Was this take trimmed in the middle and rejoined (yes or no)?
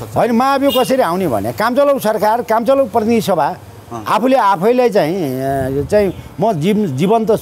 no